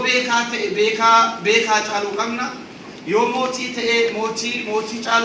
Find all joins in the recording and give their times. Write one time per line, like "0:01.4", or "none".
none